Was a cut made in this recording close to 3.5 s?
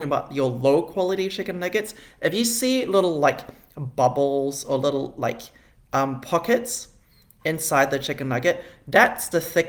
no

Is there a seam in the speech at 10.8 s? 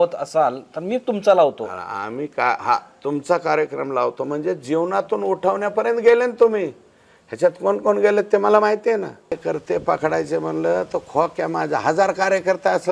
no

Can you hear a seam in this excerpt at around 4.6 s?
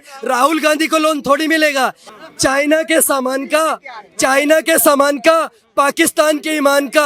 no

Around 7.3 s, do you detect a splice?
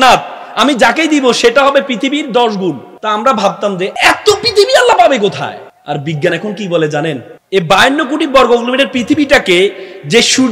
yes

